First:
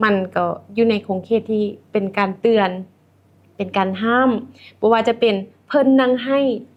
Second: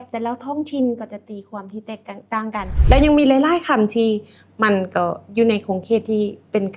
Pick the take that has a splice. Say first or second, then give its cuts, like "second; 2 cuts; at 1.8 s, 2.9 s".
second; 1 cut; at 2.7 s